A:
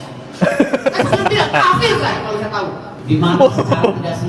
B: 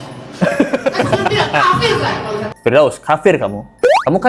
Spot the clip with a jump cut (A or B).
B